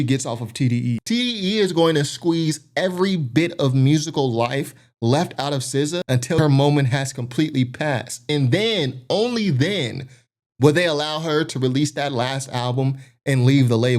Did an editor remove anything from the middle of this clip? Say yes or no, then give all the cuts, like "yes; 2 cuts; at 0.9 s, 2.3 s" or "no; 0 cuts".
yes; 2 cuts; at 1.0 s, 6.2 s